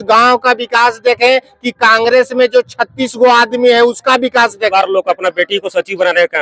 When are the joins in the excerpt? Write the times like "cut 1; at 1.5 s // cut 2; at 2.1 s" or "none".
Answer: cut 1; at 4.7 s